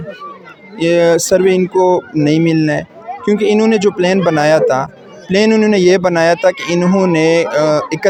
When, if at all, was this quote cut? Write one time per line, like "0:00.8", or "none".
none